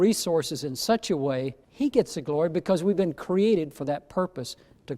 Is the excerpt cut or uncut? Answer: cut